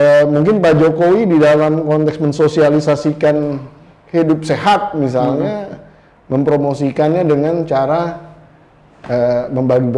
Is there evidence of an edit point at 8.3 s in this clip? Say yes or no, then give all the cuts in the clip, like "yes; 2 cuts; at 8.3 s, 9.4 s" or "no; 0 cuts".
no; 0 cuts